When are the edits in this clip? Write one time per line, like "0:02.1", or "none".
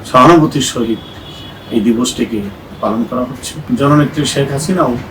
0:03.5